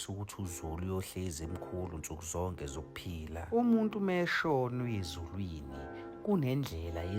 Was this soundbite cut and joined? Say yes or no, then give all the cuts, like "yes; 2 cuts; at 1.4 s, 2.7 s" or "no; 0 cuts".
no; 0 cuts